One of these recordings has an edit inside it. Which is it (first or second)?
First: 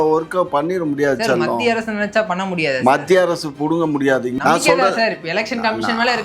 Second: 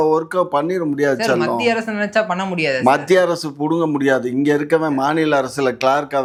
first